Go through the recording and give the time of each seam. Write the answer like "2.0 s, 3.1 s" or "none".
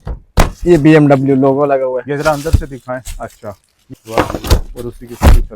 3.8 s